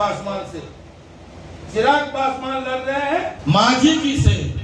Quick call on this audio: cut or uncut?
cut